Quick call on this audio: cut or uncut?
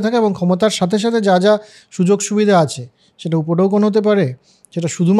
uncut